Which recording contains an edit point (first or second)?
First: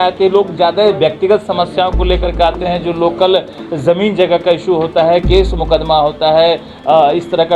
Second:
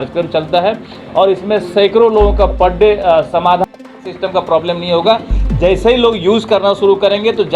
second